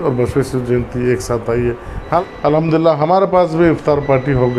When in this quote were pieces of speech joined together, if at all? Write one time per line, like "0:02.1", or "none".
0:02.2